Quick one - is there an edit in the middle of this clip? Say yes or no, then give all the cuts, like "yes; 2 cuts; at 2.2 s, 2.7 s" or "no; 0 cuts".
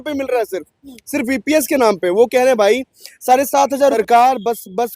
yes; 1 cut; at 3.9 s